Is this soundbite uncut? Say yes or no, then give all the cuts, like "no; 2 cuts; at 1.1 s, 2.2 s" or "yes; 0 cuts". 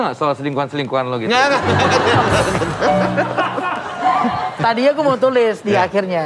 yes; 0 cuts